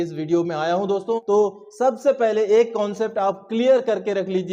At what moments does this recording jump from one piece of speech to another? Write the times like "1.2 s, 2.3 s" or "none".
1.2 s

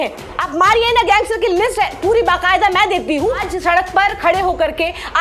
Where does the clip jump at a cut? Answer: 3.4 s

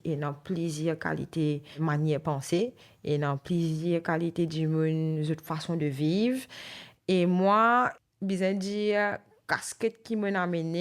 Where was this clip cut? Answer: 1.7 s, 7.9 s

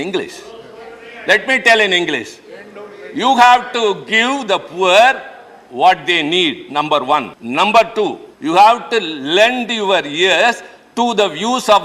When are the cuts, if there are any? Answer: 7.4 s, 8.3 s

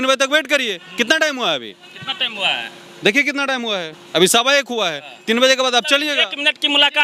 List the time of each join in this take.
none

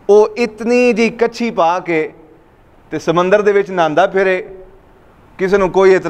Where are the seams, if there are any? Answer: none

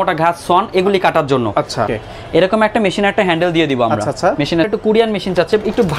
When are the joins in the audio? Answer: 1.9 s, 4.7 s

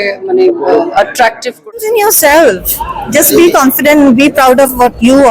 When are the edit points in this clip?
1.8 s

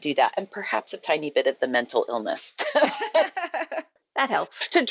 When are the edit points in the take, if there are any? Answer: 3.7 s

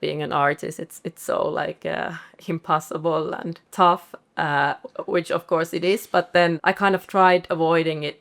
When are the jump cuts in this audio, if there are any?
3.6 s, 6.6 s

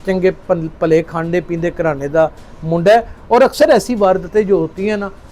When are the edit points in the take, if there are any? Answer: none

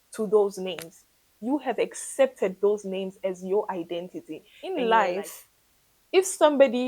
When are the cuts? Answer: 4.6 s

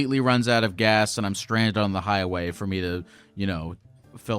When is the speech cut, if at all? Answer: none

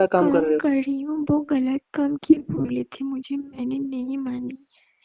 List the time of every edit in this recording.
none

